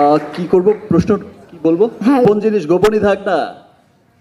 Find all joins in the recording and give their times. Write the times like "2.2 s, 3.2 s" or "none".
2.2 s